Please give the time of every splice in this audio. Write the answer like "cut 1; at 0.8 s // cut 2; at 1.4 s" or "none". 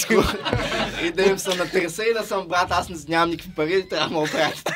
none